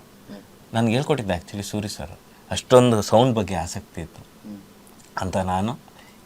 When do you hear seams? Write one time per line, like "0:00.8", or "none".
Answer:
0:02.3